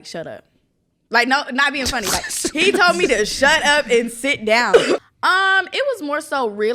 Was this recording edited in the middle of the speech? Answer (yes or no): yes